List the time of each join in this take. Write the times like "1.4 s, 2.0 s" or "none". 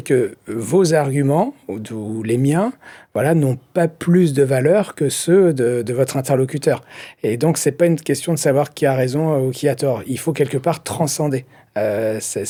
none